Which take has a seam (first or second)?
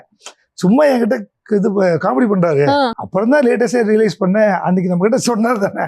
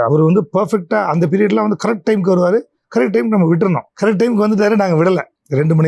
first